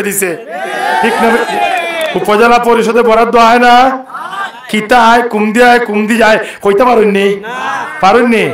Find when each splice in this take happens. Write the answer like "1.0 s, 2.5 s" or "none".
2.1 s